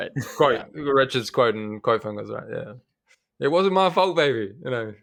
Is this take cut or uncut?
uncut